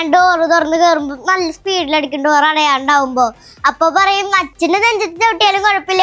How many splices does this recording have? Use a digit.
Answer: 1